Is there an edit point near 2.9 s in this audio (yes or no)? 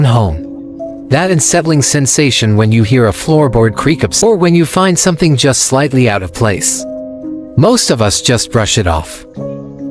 yes